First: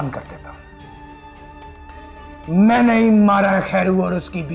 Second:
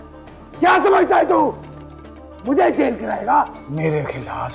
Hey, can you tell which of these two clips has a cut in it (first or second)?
second